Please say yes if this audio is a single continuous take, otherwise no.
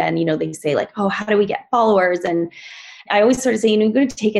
no